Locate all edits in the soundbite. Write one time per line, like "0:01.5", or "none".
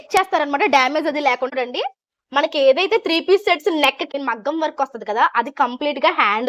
0:01.5
0:04.1

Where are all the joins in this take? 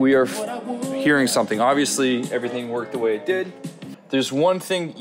0:03.9

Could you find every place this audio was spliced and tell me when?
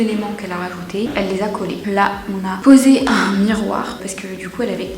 none

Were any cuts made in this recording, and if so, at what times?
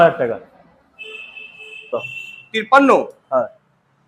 0:02.0

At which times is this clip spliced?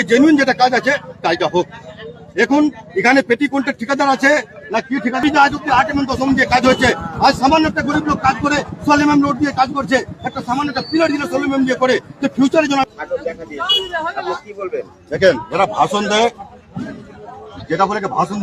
0:05.2
0:12.8

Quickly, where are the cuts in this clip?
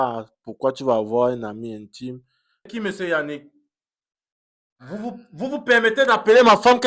0:02.7

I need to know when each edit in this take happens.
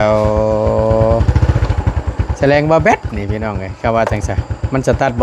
none

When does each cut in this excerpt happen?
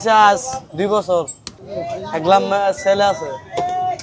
none

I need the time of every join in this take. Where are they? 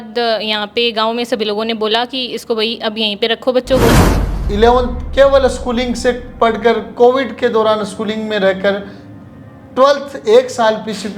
0:04.1

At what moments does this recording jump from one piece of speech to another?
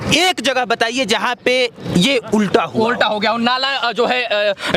none

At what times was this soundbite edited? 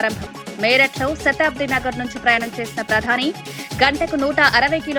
none

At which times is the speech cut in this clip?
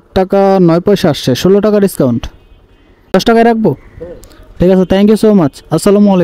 0:03.1

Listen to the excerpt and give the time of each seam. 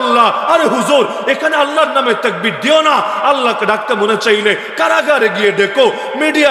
none

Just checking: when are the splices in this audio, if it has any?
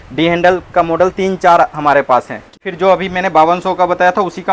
0:02.6

